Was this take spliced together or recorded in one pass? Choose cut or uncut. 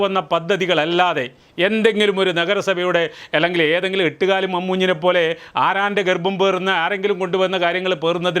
uncut